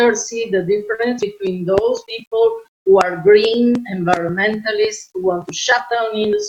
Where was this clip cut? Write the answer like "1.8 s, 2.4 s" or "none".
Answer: none